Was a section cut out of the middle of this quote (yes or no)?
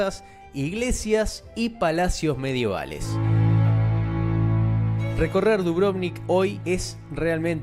yes